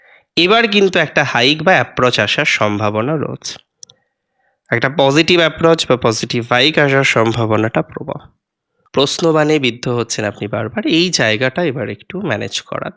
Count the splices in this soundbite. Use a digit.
1